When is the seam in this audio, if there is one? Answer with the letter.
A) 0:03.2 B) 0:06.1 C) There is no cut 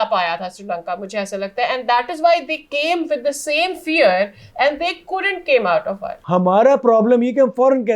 B